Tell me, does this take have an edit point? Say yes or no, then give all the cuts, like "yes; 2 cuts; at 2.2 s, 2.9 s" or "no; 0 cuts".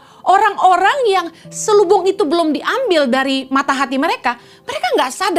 no; 0 cuts